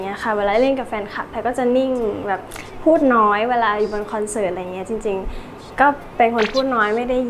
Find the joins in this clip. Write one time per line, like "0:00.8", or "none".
none